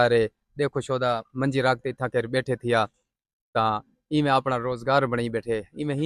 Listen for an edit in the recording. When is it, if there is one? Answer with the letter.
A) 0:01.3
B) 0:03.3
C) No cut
C